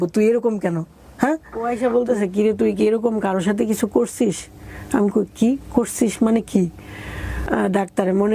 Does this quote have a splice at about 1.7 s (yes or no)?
yes